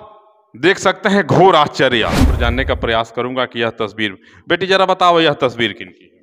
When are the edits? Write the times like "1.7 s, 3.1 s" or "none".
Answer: 2.4 s